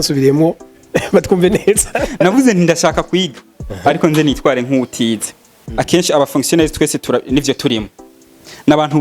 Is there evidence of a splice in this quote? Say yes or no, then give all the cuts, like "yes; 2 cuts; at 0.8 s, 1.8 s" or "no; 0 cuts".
yes; 1 cut; at 5.6 s